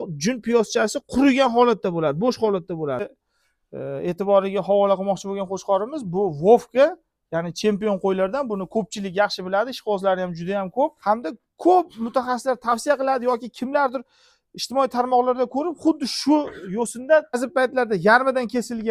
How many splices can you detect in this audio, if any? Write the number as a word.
three